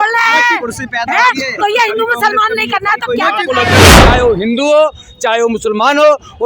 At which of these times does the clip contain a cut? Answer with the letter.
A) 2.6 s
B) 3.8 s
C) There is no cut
B